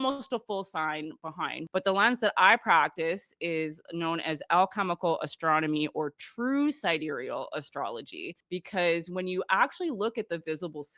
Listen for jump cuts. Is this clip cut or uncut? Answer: cut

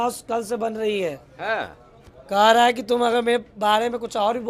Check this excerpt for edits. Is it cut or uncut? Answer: uncut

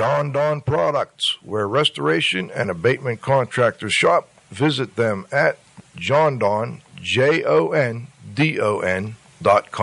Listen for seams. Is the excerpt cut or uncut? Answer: cut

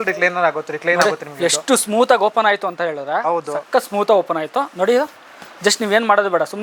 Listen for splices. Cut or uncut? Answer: uncut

